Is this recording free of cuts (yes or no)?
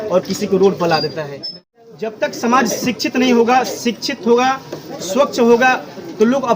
no